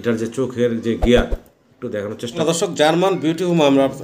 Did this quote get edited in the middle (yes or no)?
yes